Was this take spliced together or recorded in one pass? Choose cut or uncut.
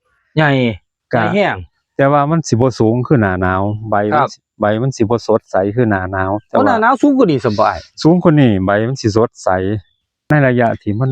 cut